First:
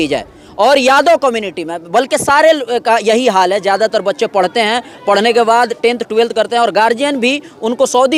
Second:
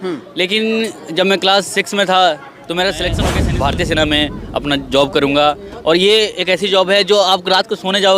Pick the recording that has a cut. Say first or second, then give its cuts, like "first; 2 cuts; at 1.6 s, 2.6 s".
second; 1 cut; at 3.3 s